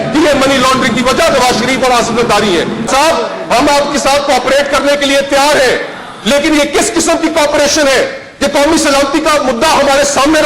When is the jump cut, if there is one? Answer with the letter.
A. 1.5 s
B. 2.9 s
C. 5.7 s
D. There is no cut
B